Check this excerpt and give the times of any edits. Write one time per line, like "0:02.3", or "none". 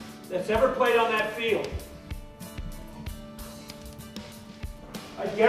0:02.6